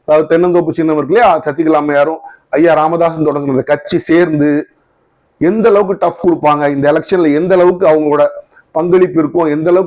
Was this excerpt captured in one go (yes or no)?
yes